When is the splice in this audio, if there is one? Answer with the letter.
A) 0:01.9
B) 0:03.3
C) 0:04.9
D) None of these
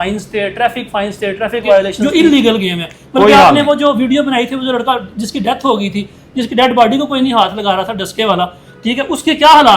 A